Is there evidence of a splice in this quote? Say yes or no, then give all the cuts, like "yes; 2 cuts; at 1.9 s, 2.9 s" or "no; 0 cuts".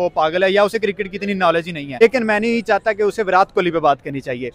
yes; 1 cut; at 2.0 s